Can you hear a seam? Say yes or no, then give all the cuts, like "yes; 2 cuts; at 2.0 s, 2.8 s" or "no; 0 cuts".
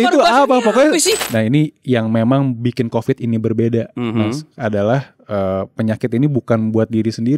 yes; 1 cut; at 1.2 s